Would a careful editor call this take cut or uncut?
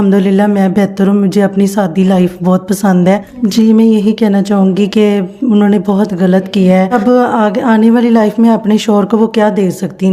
cut